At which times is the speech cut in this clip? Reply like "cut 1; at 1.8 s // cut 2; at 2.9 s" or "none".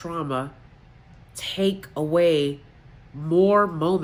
none